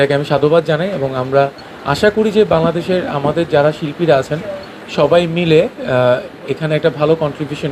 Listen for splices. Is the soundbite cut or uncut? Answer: uncut